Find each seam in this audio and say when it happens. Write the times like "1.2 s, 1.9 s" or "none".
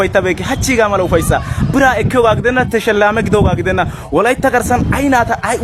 none

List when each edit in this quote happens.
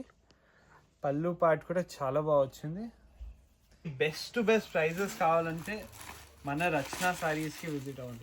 3.9 s

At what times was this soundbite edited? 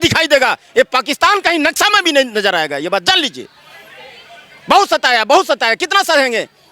none

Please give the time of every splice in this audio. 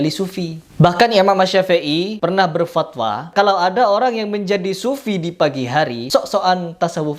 3.3 s, 6.0 s

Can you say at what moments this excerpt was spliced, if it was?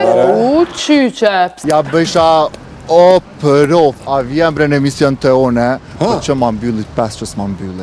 1.6 s

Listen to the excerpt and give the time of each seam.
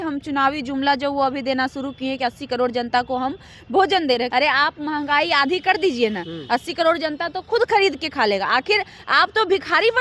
4.3 s

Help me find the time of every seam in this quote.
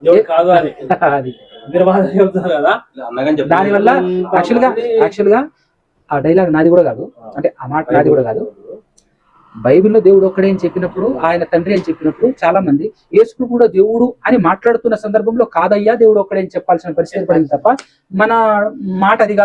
none

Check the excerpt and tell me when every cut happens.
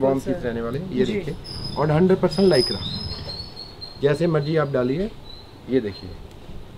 none

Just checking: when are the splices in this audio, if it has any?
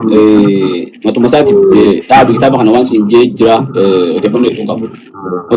none

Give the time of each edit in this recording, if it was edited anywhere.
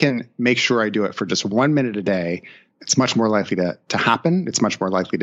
2.7 s

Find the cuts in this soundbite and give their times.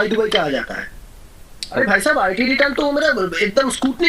1.6 s

